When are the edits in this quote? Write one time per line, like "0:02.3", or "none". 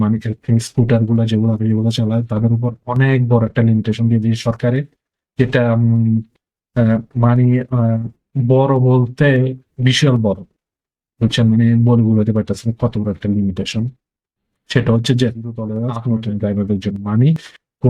0:15.6